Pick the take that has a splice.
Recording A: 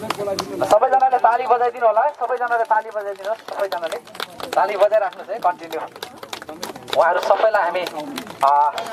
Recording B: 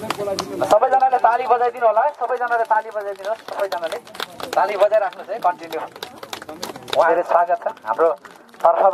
B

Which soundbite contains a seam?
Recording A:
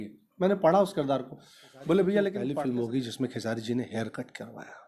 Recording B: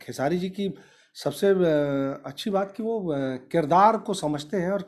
A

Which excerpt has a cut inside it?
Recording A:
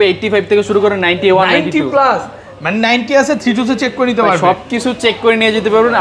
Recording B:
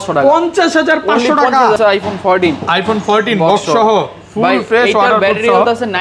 B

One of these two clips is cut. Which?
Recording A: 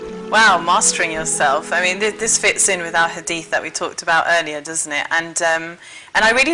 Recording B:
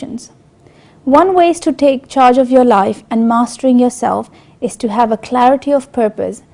B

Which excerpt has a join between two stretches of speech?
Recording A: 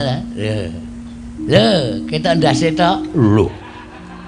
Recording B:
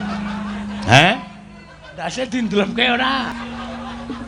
B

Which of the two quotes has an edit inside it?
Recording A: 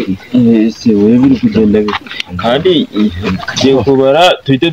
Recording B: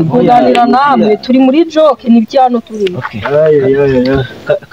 A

